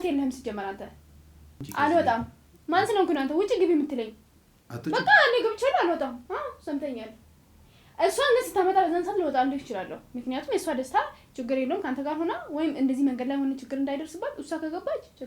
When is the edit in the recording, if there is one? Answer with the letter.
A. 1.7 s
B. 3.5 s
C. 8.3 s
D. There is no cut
A